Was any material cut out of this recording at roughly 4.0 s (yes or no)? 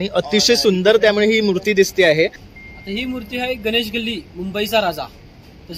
no